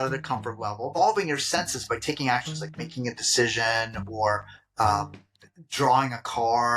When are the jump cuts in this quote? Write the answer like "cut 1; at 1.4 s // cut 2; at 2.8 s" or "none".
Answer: cut 1; at 1.0 s